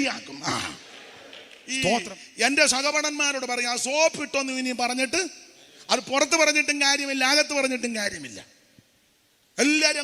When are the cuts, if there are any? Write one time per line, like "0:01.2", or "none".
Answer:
0:02.2